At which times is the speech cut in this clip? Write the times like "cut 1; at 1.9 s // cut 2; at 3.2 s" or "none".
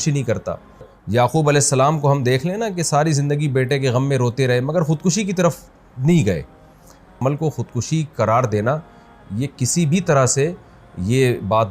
cut 1; at 1.0 s // cut 2; at 7.1 s